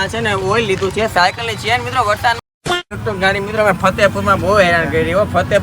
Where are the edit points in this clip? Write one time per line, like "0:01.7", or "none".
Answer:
0:02.9